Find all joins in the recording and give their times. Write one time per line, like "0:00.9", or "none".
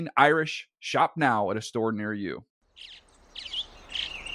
0:02.5